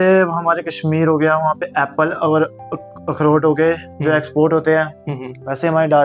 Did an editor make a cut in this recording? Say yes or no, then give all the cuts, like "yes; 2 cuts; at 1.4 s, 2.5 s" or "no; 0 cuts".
no; 0 cuts